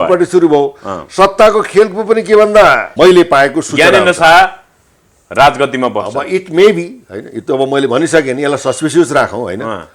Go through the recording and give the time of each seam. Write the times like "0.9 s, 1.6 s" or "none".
2.9 s